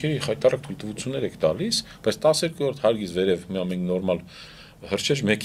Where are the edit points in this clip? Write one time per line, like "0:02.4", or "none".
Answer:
none